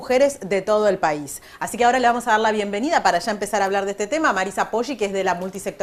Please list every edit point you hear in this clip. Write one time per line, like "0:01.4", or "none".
0:02.9